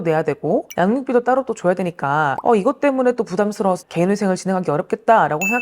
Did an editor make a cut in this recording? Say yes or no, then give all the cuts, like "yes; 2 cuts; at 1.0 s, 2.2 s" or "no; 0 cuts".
no; 0 cuts